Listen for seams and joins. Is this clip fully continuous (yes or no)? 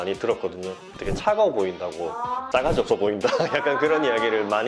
yes